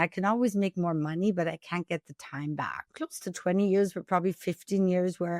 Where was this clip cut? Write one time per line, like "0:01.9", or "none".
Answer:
0:02.7